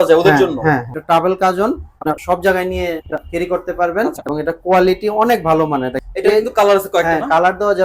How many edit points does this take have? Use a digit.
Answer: 5